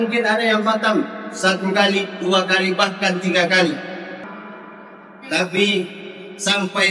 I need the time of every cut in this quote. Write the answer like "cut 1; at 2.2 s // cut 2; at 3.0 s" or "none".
cut 1; at 4.2 s